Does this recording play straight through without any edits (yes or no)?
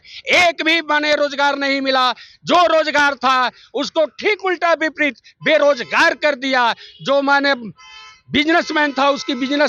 yes